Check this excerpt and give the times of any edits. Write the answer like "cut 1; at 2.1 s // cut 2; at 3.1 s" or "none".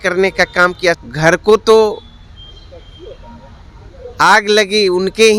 cut 1; at 1.0 s